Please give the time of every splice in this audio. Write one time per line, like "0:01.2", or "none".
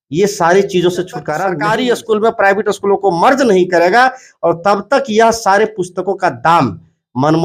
0:01.4